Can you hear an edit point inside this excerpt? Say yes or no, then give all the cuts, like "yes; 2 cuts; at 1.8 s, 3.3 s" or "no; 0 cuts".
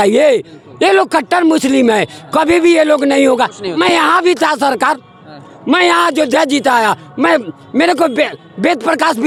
no; 0 cuts